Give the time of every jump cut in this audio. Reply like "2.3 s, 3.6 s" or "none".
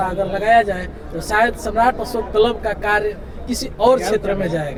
none